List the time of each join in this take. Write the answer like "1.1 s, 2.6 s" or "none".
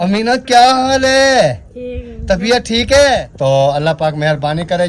3.3 s

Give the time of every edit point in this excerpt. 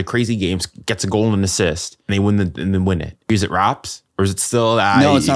2.1 s, 3.3 s

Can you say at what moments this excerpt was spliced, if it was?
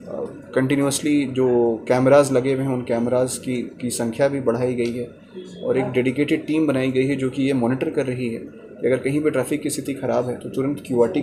none

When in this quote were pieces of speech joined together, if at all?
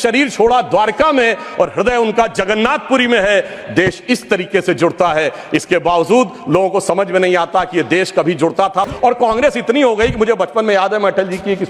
8.9 s

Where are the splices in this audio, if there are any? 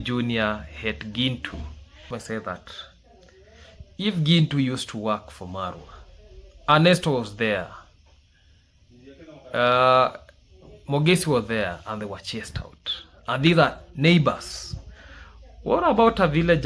2.1 s

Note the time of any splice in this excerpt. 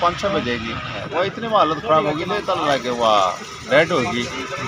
1.0 s

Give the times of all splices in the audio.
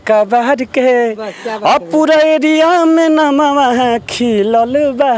none

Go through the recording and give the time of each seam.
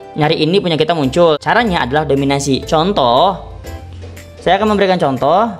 1.4 s

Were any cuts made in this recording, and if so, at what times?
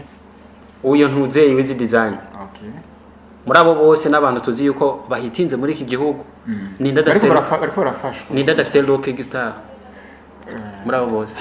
none

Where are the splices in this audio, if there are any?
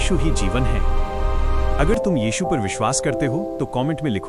none

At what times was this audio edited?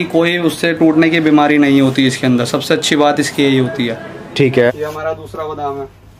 4.5 s

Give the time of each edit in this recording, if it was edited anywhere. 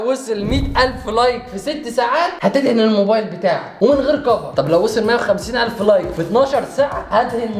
none

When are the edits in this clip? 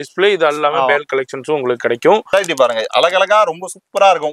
2.3 s

